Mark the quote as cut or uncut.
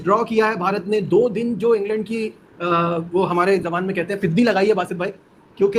uncut